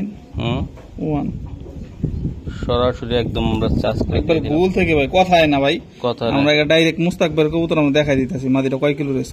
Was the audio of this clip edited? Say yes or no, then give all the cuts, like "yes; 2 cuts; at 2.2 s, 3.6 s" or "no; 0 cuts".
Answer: no; 0 cuts